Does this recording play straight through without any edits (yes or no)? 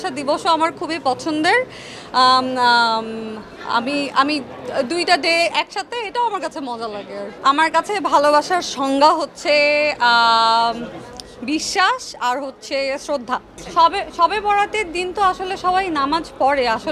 yes